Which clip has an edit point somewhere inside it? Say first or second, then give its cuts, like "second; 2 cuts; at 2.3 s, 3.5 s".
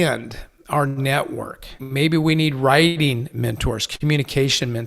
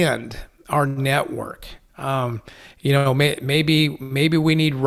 first; 1 cut; at 1.8 s